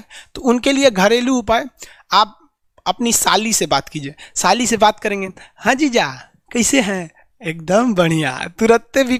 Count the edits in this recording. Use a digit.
0